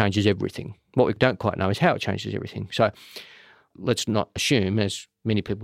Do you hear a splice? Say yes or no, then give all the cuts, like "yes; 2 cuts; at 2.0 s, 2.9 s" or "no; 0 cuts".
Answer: yes; 2 cuts; at 1.2 s, 3.7 s